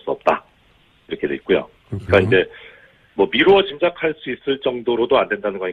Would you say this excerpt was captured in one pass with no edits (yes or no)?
yes